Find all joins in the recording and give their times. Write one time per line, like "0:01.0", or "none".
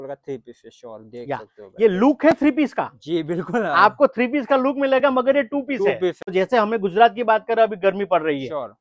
0:06.2